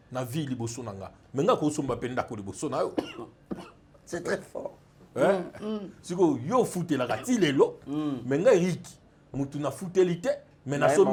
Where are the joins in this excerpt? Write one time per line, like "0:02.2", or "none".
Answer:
none